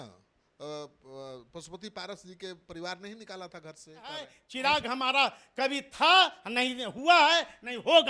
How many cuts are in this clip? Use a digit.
1